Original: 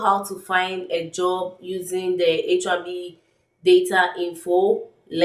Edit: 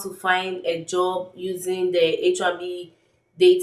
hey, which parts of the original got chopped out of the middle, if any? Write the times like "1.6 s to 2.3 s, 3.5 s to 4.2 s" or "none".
none

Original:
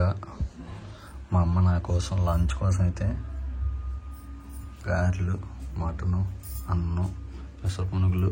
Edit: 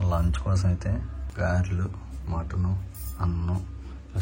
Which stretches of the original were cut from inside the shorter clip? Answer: 3.3 s to 4.7 s

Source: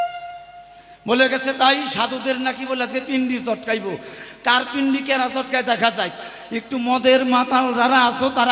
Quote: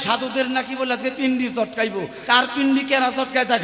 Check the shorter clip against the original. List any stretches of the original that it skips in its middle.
4.1 s to 4.3 s

